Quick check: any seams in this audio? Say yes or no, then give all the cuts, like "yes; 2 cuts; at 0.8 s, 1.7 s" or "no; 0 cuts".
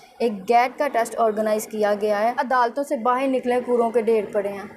yes; 1 cut; at 2.4 s